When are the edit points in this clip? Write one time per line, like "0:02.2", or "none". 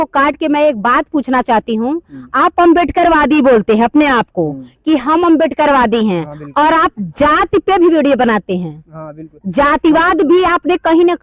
none